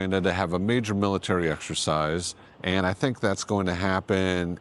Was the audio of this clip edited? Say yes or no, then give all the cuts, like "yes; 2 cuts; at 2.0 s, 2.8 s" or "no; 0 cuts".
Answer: no; 0 cuts